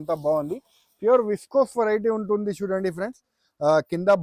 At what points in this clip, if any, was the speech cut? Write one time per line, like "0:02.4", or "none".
none